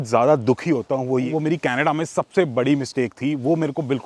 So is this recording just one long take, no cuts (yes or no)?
no